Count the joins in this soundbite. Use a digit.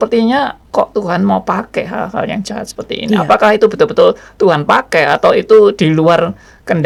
0